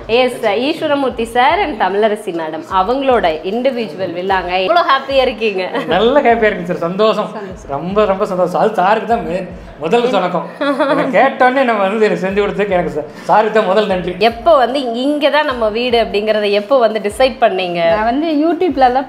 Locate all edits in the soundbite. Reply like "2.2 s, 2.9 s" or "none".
4.7 s, 14.1 s